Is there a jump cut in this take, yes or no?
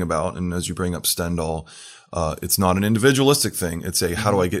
no